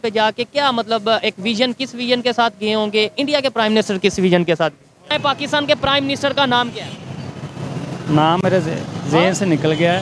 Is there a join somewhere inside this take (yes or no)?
yes